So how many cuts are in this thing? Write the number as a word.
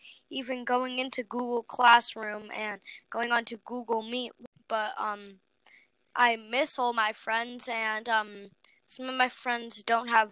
one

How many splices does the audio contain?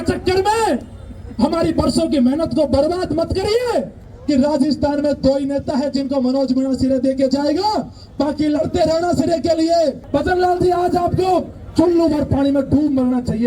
two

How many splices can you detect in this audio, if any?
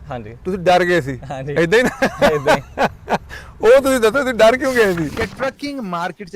one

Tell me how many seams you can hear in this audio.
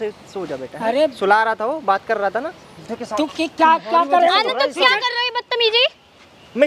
one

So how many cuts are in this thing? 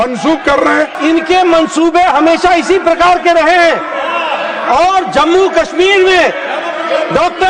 one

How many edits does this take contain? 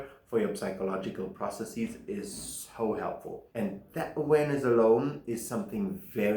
one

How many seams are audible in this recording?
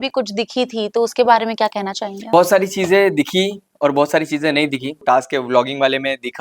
one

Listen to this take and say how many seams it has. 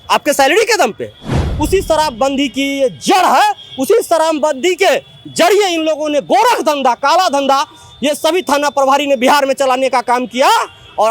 one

